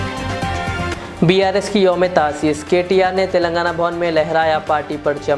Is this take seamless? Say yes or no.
no